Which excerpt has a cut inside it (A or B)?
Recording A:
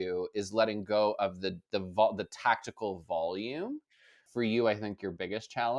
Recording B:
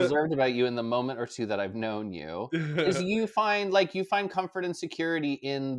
A